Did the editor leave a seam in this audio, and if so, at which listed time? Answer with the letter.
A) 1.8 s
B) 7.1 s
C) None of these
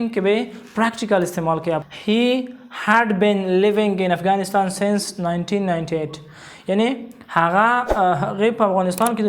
A